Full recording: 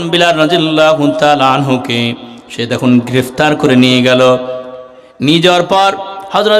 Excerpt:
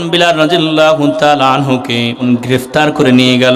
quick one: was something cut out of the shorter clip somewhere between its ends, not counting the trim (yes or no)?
yes